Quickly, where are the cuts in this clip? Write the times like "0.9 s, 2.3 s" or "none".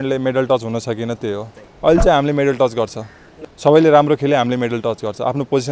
none